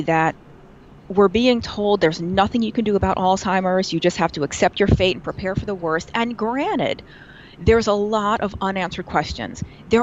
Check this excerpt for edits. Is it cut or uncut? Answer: uncut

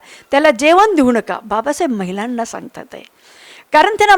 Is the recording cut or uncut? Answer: uncut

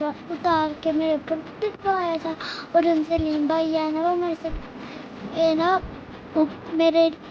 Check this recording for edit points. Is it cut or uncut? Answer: uncut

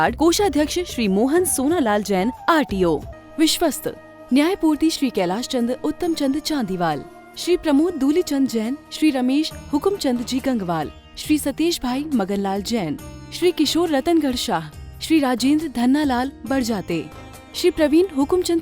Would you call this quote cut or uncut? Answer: cut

